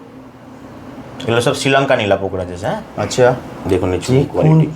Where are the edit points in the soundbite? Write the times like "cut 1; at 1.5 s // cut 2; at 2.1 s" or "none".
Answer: cut 1; at 3.4 s